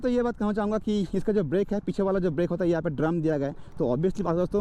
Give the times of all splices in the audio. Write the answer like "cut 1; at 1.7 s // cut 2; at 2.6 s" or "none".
none